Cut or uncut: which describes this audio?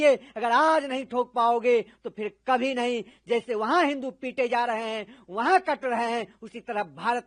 uncut